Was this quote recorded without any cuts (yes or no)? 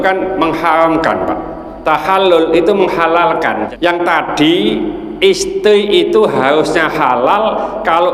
no